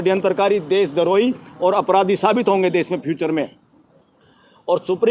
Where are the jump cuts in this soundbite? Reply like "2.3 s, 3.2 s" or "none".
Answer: none

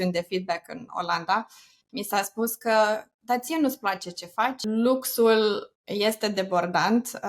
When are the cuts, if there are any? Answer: 4.6 s

